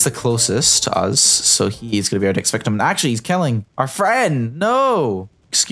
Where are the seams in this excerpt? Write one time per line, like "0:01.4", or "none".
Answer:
none